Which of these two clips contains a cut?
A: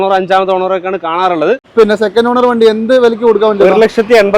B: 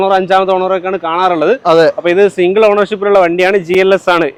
A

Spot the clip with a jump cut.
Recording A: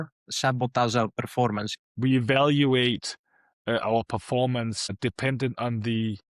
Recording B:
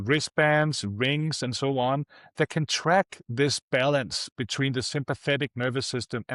A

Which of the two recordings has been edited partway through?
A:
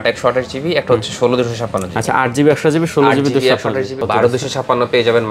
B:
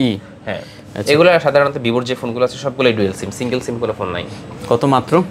A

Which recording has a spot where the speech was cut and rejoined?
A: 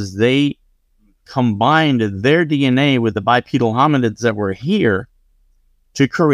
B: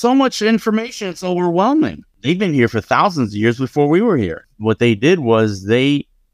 B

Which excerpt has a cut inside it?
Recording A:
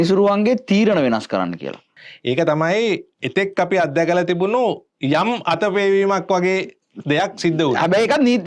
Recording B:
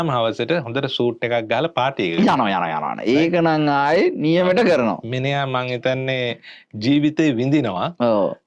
A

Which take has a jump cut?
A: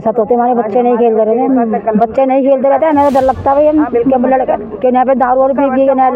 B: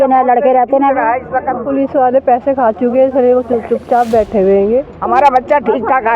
B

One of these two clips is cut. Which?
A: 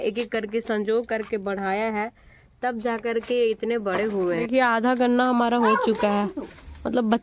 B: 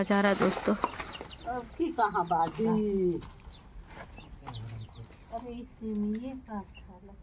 A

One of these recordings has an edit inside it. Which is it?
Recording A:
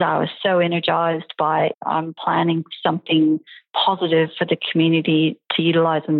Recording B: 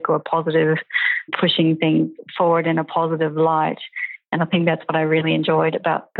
A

